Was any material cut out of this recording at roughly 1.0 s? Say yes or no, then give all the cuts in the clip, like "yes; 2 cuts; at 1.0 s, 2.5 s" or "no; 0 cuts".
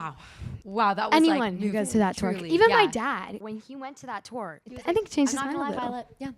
no; 2 cuts; at 3.4 s, 4.7 s